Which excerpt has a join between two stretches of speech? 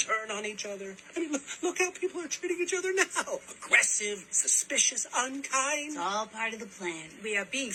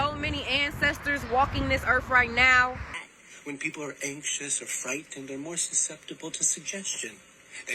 second; 1 cut; at 3.0 s

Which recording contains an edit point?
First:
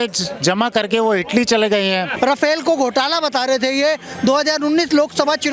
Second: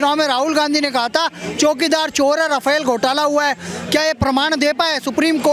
first; 1 cut; at 2.0 s

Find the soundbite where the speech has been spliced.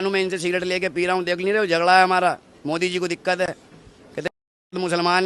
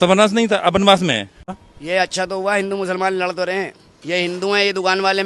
second; 1 cut; at 1.7 s

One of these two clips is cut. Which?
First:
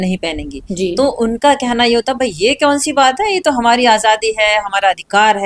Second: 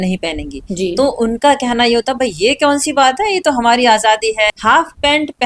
second; 1 cut; at 4.5 s

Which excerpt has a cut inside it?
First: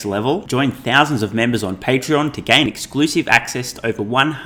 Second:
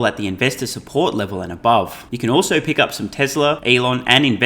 second; 2 cuts; at 2.0 s, 3.6 s

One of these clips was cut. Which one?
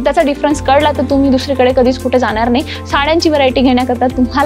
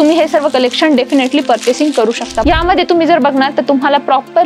second; 1 cut; at 2.4 s

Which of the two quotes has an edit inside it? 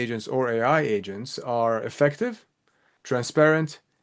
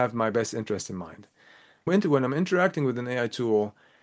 second; 1 cut; at 1.9 s

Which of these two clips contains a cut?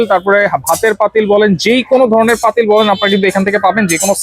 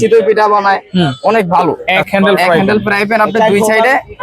second; 1 cut; at 1.9 s

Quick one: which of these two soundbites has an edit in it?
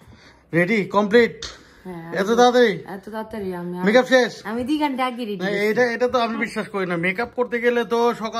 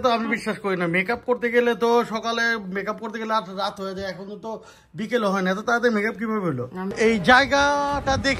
second; 1 cut; at 6.9 s

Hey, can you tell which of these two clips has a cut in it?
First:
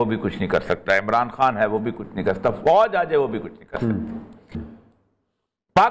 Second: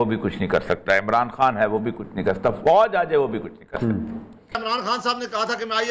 second; 1 cut; at 4.5 s

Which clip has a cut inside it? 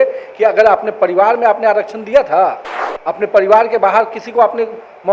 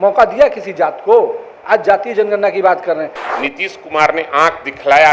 second; 1 cut; at 3.2 s

